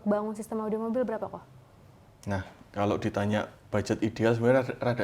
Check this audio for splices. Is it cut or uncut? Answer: uncut